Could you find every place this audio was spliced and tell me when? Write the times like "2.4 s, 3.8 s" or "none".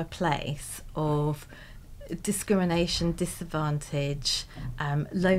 none